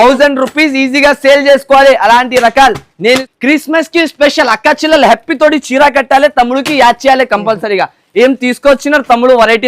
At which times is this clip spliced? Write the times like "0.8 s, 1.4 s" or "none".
3.3 s

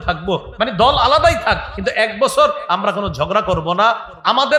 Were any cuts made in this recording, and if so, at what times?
none

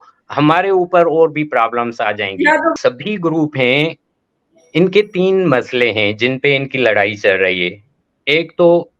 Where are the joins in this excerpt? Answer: 2.7 s

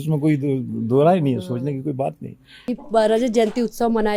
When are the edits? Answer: 2.5 s

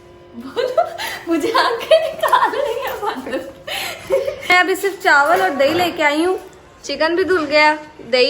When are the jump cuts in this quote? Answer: 4.4 s

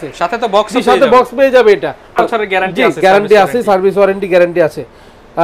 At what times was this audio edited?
2.2 s

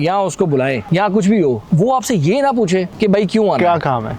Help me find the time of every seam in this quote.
0.8 s, 1.6 s, 2.9 s

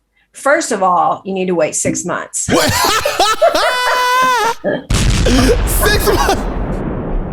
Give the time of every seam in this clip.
none

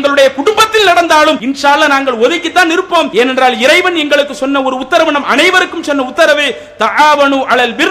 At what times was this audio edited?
1.4 s, 3.1 s

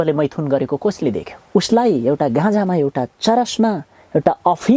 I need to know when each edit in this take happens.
1.3 s

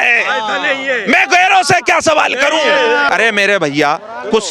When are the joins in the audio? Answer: 3.1 s

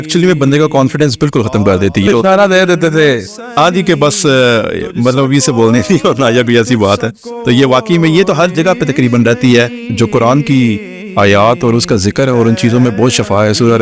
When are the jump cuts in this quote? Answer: 2.1 s, 9.8 s

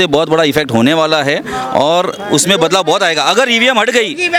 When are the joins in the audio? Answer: none

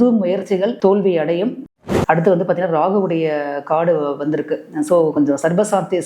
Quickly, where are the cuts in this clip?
1.7 s

